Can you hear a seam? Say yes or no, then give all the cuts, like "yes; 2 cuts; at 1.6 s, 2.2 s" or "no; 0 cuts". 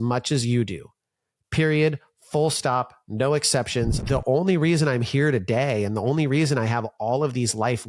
yes; 1 cut; at 4.0 s